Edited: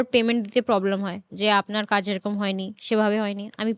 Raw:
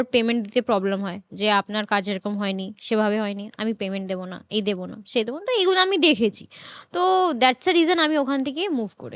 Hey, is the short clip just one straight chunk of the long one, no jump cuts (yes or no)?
yes